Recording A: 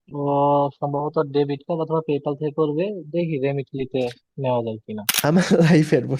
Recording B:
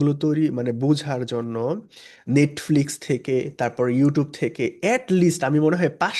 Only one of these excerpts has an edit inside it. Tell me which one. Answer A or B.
A